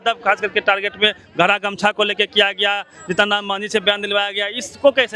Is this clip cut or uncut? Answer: uncut